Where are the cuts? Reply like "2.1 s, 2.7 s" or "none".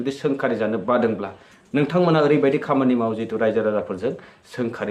none